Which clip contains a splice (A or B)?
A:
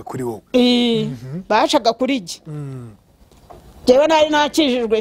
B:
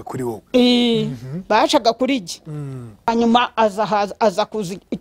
B